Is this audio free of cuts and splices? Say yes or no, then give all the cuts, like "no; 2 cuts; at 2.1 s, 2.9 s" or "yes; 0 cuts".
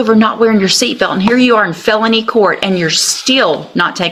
yes; 0 cuts